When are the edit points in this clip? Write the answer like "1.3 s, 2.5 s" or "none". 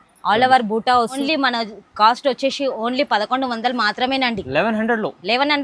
1.2 s